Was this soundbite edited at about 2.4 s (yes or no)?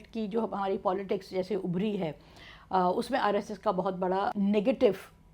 no